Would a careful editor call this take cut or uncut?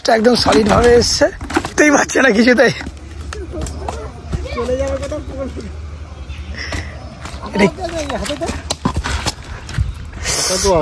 uncut